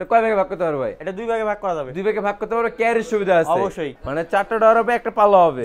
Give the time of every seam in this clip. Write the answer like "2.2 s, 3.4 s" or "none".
3.9 s